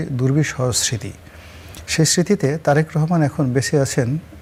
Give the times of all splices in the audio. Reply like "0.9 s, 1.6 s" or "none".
none